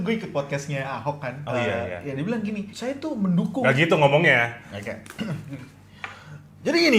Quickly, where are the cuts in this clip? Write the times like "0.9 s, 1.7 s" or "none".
none

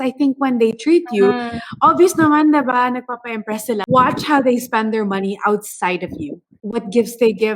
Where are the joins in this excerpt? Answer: 3.8 s

